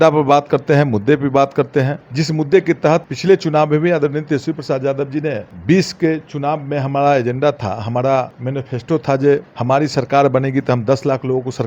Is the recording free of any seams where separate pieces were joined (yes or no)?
no